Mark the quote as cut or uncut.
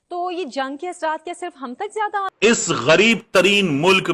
cut